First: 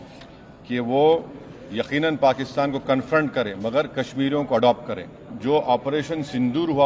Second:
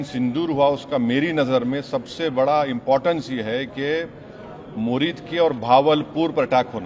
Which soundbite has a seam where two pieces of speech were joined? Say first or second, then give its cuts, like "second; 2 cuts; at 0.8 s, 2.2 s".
first; 1 cut; at 5.3 s